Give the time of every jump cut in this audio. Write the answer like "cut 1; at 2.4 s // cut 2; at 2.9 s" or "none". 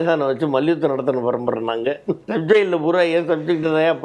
cut 1; at 2.2 s